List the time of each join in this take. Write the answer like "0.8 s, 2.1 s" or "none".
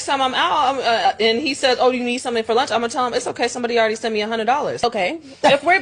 4.3 s